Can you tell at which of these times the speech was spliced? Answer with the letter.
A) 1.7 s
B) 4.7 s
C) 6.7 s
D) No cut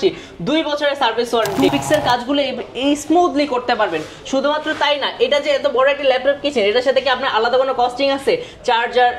A